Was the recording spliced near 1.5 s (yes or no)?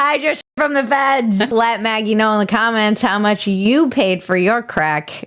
yes